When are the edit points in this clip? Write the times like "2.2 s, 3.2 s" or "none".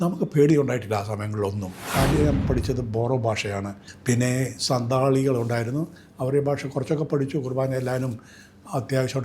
1.8 s, 3.8 s